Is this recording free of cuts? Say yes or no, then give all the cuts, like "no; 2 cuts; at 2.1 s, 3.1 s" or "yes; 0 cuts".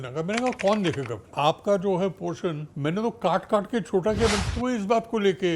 no; 3 cuts; at 1.2 s, 2.7 s, 4.5 s